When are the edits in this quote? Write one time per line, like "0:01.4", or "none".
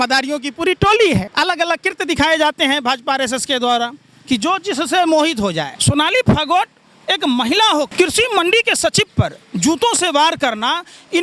0:01.3
0:05.7
0:07.9